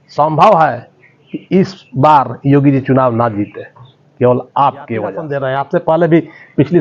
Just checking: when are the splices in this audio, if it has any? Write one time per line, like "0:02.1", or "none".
0:05.3